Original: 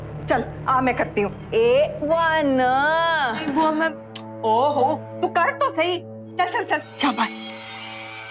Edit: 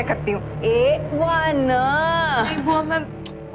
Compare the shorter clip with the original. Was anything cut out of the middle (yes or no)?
no